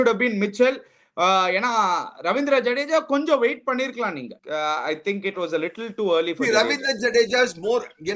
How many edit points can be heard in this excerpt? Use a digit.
1